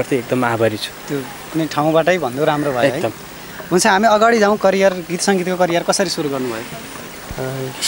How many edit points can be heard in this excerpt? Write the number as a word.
zero